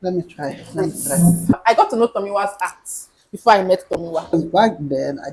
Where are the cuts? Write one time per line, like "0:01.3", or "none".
0:01.5
0:04.3